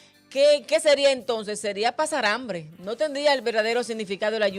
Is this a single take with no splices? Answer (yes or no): yes